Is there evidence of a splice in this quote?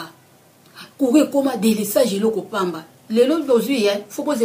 no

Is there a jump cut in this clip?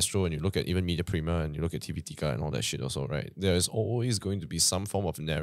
no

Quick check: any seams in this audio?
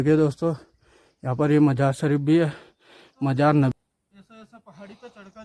yes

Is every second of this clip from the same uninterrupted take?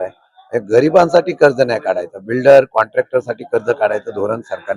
yes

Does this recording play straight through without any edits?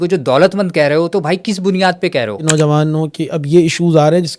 no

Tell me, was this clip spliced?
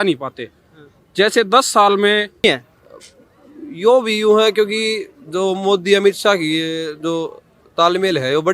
yes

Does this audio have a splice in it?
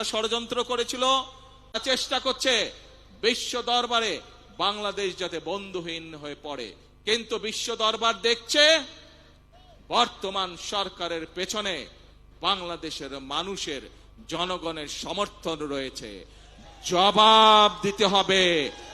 yes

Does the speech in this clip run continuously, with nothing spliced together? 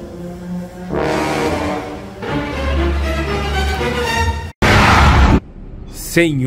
no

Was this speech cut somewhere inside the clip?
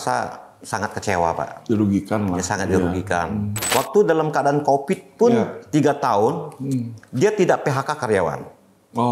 yes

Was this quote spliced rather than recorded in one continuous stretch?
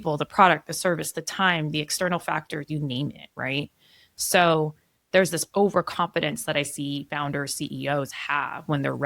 no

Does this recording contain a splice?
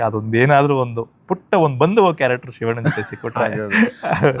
no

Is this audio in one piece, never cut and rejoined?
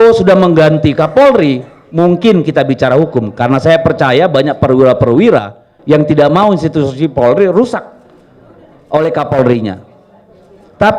yes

